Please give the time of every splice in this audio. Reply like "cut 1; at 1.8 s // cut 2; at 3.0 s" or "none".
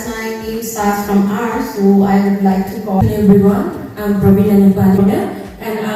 cut 1; at 3.0 s // cut 2; at 5.0 s